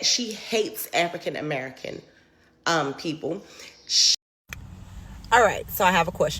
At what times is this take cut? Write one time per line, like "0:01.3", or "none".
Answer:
0:04.1